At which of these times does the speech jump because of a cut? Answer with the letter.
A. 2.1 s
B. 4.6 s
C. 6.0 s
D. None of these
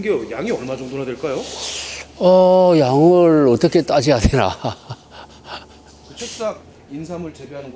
C